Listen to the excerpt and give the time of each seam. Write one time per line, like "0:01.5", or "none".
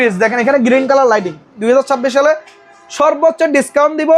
0:01.6